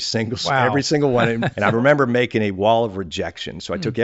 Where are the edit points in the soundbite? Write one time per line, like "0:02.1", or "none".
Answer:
0:01.5